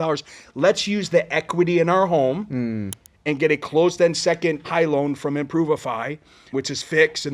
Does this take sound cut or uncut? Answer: cut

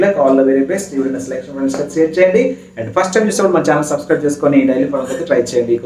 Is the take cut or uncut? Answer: uncut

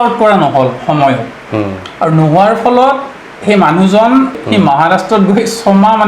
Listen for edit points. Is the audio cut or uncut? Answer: cut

